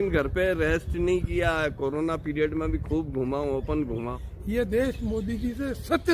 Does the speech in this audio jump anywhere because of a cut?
yes; 1 cut; at 4.2 s

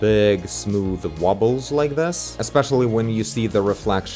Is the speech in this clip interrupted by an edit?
yes; 1 cut; at 2.4 s

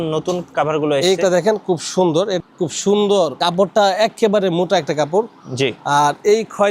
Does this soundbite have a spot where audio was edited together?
yes; 1 cut; at 2.4 s

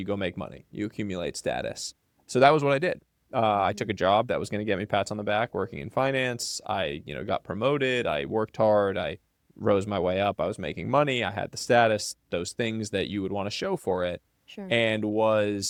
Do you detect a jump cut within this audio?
no; 0 cuts

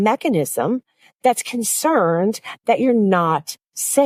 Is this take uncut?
yes; 0 cuts

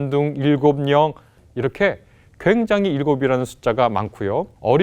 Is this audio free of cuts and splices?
no; 1 cut; at 1.4 s

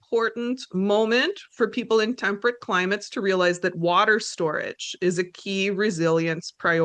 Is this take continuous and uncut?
yes; 0 cuts

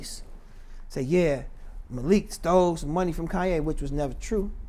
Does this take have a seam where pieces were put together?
no; 0 cuts

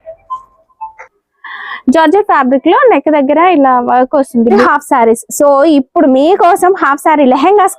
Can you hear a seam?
yes; 1 cut; at 4.6 s

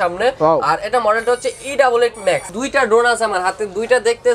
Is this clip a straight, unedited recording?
no; 1 cut; at 2.5 s

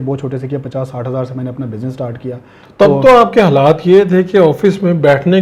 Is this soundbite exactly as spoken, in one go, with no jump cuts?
yes; 0 cuts

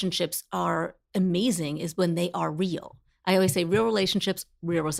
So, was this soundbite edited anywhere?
no; 0 cuts

